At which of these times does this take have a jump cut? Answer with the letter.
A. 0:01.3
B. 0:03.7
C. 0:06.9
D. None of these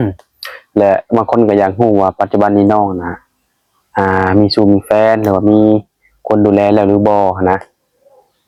D